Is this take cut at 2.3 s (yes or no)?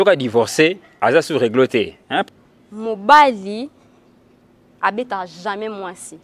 yes